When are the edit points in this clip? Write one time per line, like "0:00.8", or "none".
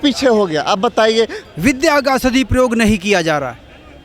0:01.4